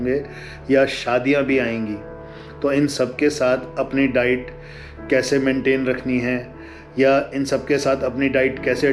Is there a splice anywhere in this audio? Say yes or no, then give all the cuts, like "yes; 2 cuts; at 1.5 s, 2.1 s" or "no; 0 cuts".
no; 0 cuts